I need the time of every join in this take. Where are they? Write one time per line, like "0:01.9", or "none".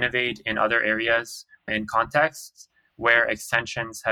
0:01.7